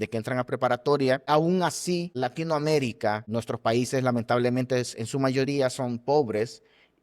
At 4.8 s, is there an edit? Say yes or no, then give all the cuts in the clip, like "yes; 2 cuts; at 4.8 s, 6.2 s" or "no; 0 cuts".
no; 3 cuts; at 1.2 s, 2.1 s, 3.2 s